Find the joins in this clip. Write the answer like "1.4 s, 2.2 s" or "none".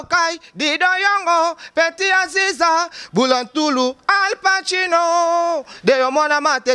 none